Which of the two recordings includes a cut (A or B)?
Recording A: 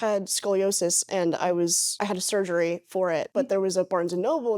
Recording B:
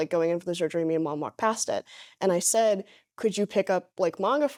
A